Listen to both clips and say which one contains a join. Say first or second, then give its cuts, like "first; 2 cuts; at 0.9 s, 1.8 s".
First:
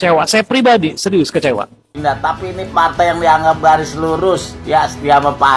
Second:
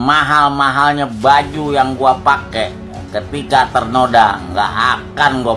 first; 1 cut; at 1.9 s